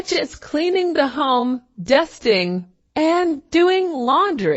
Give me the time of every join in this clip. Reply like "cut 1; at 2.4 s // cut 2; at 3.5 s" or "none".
cut 1; at 2.8 s